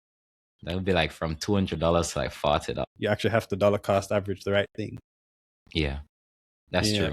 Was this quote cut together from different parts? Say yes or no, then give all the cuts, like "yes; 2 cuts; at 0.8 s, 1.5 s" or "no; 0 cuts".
yes; 1 cut; at 2.9 s